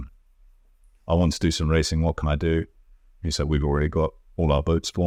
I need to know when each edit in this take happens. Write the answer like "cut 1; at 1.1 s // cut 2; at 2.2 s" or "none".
none